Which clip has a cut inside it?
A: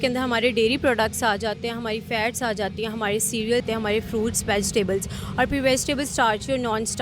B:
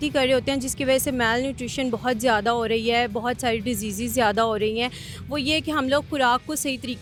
A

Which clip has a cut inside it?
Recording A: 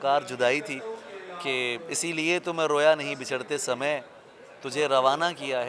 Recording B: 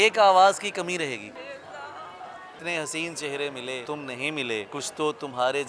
B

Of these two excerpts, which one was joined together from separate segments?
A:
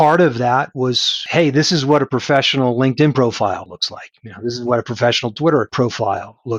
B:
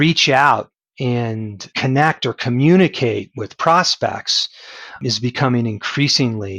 A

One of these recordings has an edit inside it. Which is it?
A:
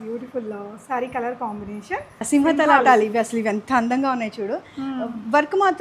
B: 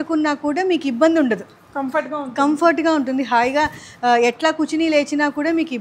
A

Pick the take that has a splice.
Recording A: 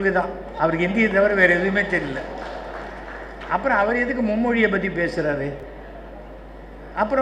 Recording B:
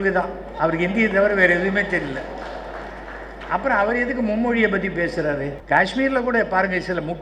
B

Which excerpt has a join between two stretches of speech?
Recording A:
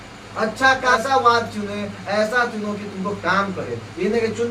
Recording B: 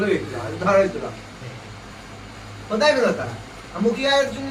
A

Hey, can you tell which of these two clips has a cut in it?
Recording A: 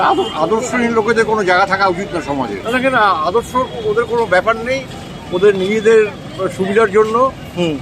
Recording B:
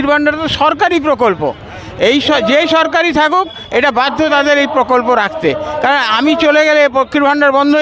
A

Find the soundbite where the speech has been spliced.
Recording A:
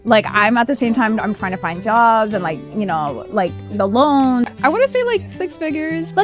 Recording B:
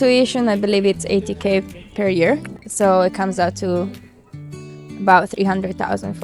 A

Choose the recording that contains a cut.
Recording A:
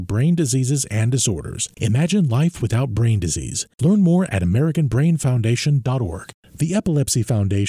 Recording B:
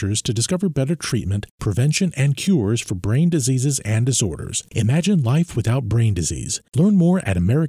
A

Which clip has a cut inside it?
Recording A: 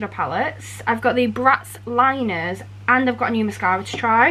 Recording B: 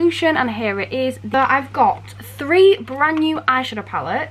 B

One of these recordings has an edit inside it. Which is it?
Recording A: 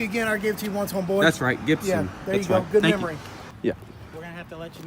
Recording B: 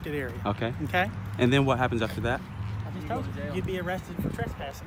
A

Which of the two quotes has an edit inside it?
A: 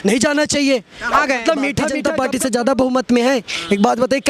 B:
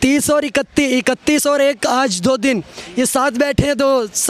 A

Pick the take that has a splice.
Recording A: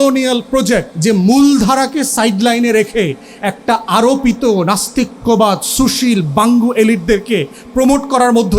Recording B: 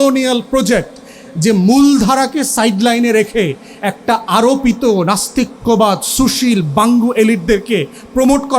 A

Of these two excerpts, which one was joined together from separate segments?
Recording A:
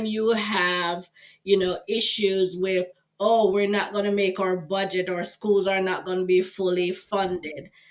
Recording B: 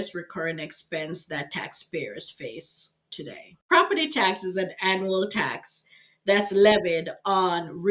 B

